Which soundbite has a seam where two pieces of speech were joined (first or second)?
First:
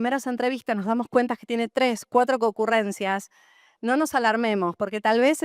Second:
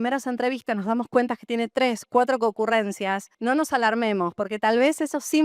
second